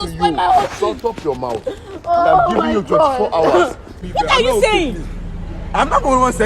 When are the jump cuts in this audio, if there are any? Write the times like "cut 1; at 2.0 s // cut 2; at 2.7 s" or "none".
cut 1; at 4.0 s